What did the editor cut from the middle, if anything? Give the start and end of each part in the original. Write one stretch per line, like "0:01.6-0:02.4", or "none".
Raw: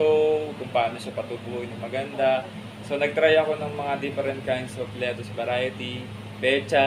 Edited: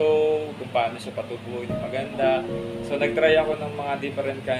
none